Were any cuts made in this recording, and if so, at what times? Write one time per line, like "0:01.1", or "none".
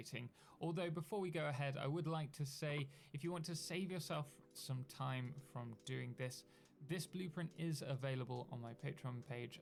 none